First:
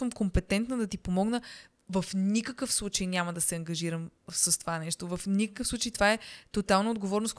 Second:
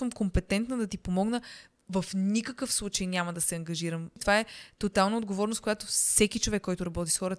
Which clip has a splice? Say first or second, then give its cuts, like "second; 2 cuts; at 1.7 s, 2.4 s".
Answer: second; 1 cut; at 4.2 s